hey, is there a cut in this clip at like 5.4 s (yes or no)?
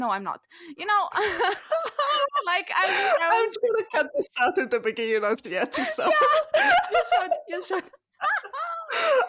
yes